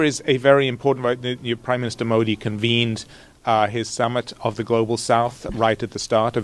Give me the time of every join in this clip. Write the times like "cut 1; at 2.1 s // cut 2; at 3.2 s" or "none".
none

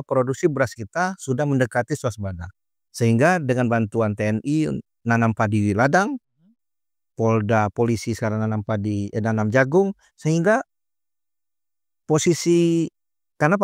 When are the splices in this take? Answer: none

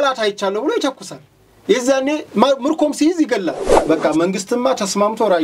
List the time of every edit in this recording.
cut 1; at 3.7 s

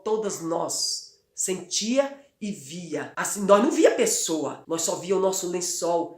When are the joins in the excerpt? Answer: cut 1; at 3.2 s // cut 2; at 4.6 s

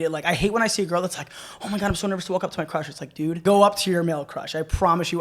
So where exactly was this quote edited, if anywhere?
cut 1; at 3.4 s

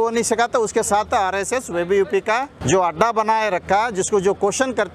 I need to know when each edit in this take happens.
cut 1; at 2.6 s

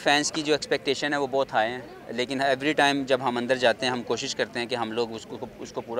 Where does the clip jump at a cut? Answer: none

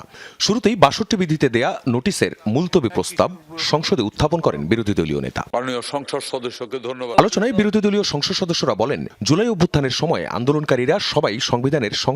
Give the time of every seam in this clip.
cut 1; at 5.4 s

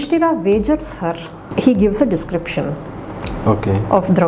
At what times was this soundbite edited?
cut 1; at 1.5 s

